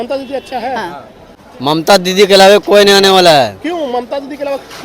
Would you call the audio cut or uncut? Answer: cut